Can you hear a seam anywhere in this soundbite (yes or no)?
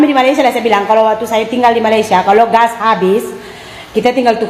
no